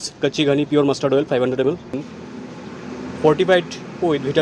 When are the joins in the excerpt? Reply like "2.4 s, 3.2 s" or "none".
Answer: 1.9 s